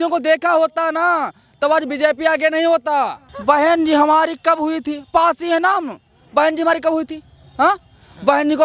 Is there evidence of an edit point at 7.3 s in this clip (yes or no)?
no